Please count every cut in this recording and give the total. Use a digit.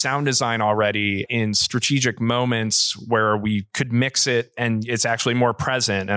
1